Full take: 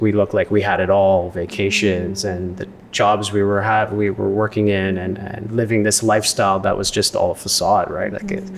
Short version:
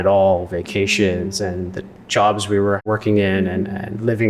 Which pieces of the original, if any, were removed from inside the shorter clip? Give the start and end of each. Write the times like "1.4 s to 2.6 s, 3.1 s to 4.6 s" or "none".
3.7 s to 4.3 s